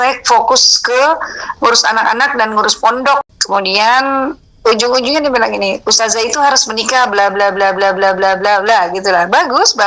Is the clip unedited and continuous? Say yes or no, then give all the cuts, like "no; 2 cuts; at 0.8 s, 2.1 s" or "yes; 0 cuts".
no; 1 cut; at 3.2 s